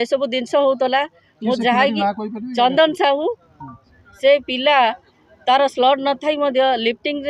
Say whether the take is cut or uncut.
uncut